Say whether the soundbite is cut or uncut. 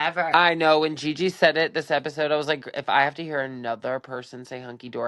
uncut